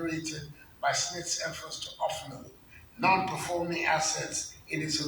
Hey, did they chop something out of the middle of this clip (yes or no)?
no